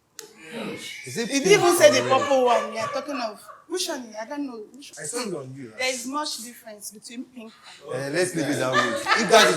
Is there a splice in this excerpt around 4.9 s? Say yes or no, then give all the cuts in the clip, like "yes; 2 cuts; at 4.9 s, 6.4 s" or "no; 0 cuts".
yes; 1 cut; at 4.9 s